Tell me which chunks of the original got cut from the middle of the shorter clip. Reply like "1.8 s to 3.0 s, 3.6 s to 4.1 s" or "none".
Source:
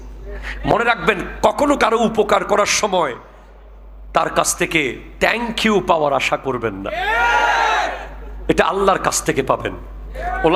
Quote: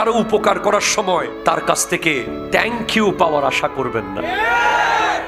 3.2 s to 4.0 s